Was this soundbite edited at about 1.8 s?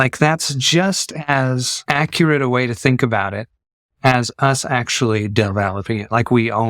yes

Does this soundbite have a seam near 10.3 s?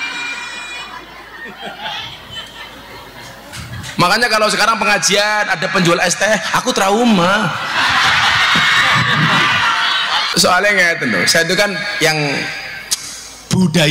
yes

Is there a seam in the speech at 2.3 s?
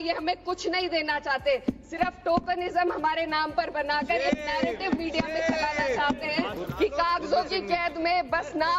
no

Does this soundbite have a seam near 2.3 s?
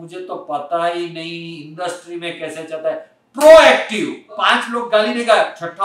no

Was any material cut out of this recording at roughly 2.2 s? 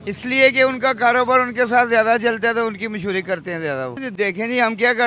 no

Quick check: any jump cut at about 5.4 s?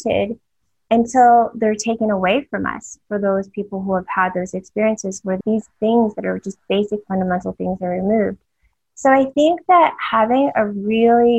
yes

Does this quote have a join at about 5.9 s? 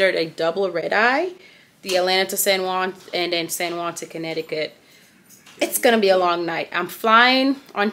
no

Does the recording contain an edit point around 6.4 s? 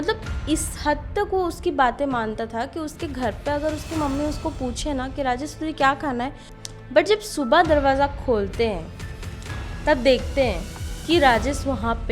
yes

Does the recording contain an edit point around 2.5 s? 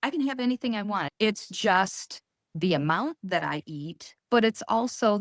yes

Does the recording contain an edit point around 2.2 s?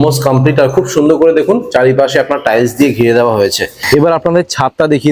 no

